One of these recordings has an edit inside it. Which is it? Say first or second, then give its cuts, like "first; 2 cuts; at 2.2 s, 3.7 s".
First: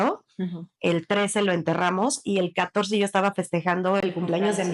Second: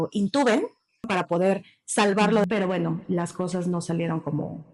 second; 2 cuts; at 1.1 s, 2.4 s